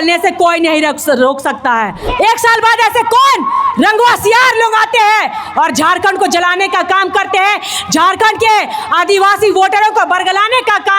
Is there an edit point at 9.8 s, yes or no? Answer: no